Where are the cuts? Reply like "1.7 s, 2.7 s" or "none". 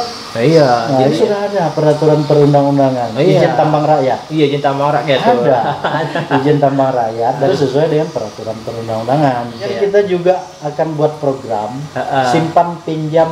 1.2 s, 7.5 s, 9.7 s